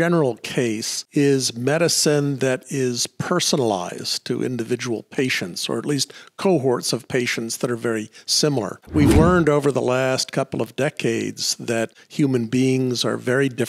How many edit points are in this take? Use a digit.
3